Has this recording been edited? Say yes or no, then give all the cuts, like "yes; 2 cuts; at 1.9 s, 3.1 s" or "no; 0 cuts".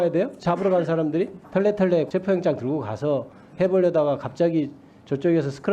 yes; 2 cuts; at 1.4 s, 2.1 s